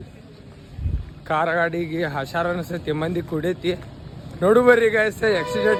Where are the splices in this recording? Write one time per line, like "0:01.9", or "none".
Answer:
none